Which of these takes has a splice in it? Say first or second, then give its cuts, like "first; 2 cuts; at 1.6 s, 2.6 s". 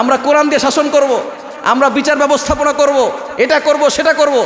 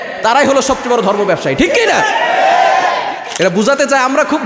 second; 1 cut; at 3.2 s